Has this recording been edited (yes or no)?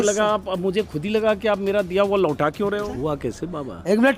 yes